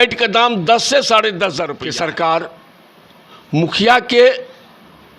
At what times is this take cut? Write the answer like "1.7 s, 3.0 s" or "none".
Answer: 1.8 s